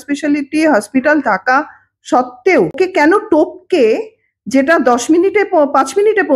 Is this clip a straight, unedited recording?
no; 1 cut; at 2.7 s

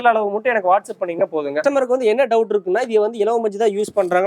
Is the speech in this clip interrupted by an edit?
yes; 1 cut; at 1.6 s

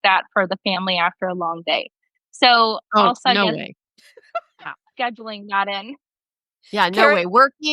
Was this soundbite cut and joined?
no; 0 cuts

